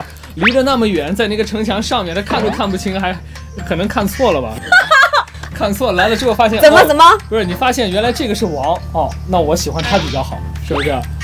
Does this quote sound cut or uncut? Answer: uncut